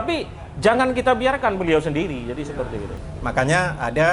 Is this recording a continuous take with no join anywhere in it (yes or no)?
no